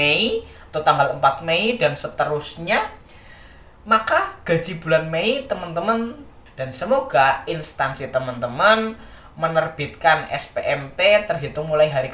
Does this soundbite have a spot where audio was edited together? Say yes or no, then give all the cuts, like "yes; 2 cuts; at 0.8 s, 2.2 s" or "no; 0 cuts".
yes; 1 cut; at 6.4 s